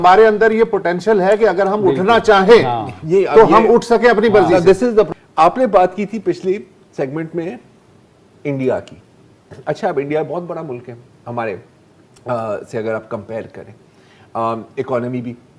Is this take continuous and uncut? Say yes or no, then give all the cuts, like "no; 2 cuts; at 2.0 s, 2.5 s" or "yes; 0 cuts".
no; 1 cut; at 5.1 s